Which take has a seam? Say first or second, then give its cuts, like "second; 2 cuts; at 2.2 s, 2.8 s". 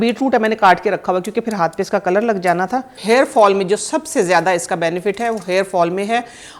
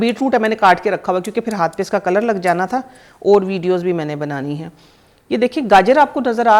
first; 1 cut; at 3.0 s